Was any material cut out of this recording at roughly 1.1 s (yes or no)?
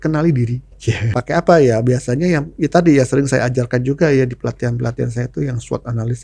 yes